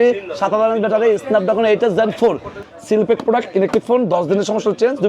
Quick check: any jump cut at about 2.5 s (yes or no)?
yes